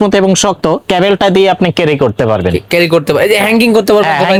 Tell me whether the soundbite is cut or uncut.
uncut